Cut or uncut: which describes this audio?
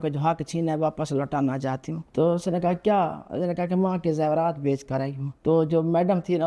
uncut